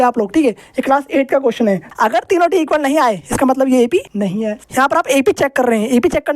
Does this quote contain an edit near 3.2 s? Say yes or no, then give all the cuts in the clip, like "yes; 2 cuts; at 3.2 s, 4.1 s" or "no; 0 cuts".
no; 2 cuts; at 1.9 s, 4.4 s